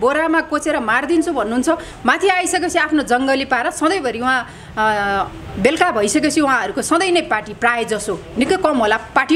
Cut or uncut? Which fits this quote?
cut